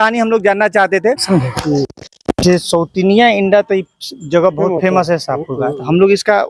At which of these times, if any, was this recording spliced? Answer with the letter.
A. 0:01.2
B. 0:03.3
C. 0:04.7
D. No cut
A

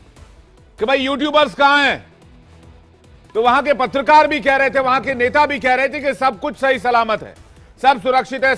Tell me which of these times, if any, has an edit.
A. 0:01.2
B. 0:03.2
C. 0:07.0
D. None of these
D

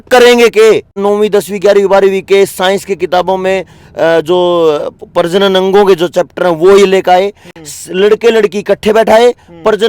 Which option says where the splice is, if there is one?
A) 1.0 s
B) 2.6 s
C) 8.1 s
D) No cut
A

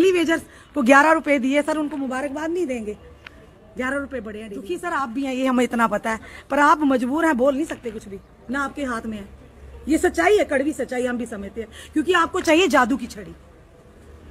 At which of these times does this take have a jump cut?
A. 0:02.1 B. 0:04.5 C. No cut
B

